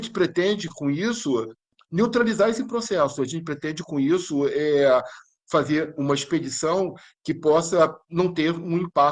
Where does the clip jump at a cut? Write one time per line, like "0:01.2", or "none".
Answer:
0:01.7